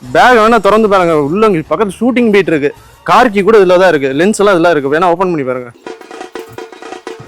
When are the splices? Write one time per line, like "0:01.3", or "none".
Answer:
0:05.7